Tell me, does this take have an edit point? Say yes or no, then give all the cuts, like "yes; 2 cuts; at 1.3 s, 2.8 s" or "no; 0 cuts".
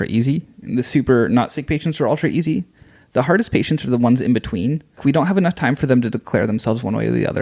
yes; 1 cut; at 5.0 s